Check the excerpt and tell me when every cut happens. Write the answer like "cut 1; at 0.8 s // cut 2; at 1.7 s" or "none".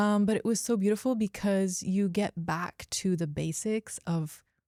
none